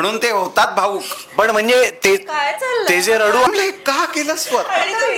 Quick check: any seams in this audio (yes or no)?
yes